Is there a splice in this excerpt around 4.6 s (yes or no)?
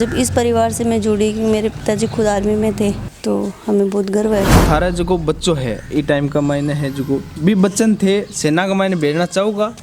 yes